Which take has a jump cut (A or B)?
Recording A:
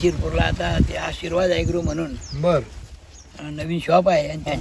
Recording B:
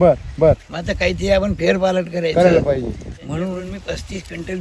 B